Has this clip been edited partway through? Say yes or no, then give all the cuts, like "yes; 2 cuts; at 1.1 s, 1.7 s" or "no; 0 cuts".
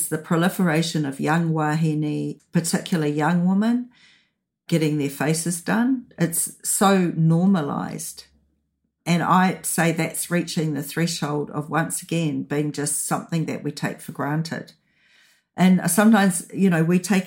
no; 0 cuts